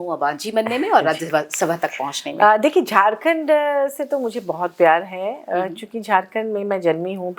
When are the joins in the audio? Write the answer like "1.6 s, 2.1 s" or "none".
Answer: none